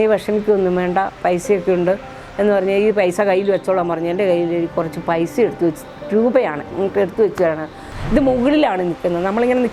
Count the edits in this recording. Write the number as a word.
one